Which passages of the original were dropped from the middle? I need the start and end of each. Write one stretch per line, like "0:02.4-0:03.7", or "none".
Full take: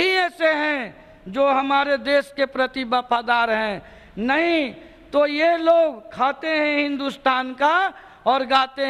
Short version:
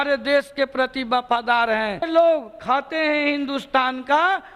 0:03.9-0:05.6